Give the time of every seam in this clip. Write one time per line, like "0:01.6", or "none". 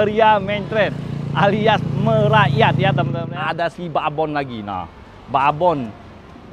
0:03.2